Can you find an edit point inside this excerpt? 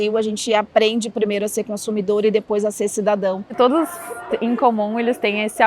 yes; 1 cut; at 3.4 s

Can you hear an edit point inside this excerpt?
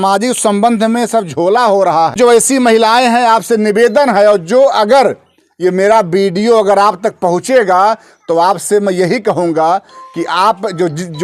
no; 0 cuts

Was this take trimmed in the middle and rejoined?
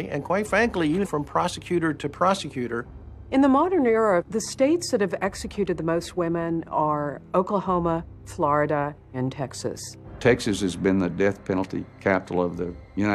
yes; 1 cut; at 4.5 s

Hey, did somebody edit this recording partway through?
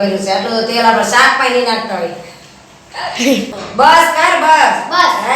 yes; 1 cut; at 3.5 s

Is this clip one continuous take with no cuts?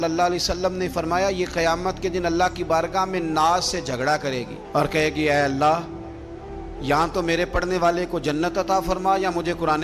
yes; 0 cuts

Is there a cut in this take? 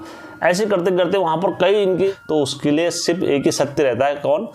yes; 1 cut; at 2.1 s

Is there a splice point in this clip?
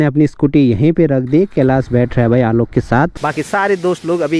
yes; 1 cut; at 3.2 s

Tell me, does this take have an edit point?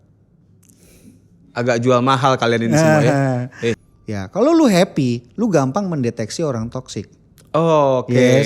yes; 1 cut; at 3.9 s

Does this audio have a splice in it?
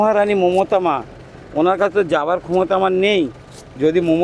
no; 0 cuts

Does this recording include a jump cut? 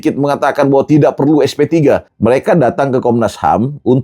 yes; 1 cut; at 2.1 s

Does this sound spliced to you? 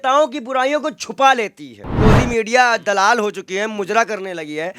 yes; 1 cut; at 1.9 s

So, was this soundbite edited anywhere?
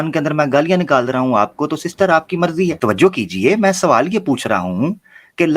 yes; 1 cut; at 2.8 s

